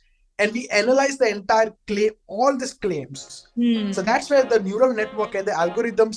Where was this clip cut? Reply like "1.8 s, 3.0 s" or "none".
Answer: none